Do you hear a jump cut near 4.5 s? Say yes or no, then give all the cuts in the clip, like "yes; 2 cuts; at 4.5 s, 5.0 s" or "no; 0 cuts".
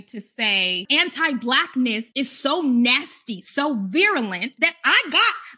yes; 3 cuts; at 0.8 s, 2.1 s, 4.5 s